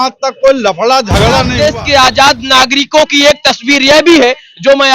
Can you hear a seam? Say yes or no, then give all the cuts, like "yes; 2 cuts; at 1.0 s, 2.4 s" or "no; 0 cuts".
yes; 1 cut; at 1.5 s